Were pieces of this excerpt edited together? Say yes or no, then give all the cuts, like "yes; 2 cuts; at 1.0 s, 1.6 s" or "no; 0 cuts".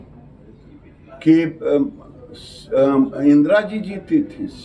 no; 0 cuts